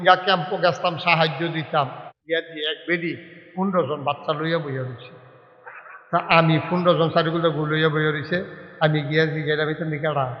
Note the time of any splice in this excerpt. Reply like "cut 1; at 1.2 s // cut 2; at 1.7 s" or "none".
cut 1; at 2.0 s